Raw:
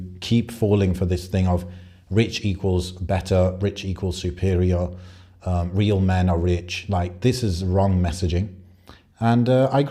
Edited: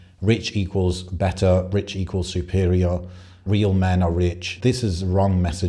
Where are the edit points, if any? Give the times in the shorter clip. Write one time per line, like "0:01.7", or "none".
0:03.4
0:04.5